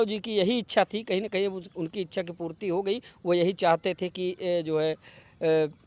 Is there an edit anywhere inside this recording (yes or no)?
no